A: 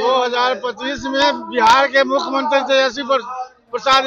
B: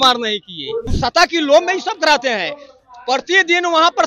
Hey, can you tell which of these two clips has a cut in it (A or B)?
B